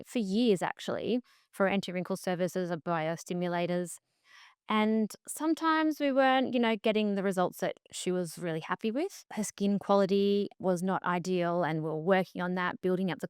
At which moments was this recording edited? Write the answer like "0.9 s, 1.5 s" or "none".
9.2 s, 10.5 s